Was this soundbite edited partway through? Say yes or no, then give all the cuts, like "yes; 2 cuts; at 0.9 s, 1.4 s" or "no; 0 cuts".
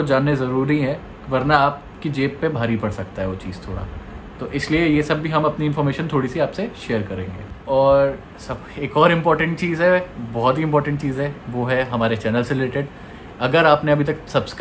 no; 0 cuts